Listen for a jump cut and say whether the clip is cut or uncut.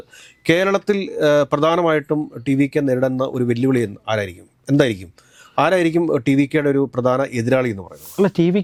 uncut